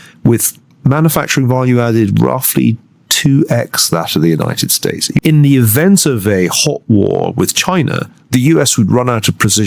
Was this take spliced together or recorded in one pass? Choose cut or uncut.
cut